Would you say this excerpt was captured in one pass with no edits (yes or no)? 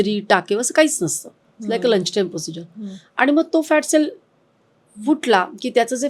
yes